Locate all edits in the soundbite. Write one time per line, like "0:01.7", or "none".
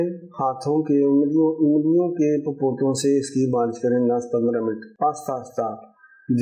0:04.9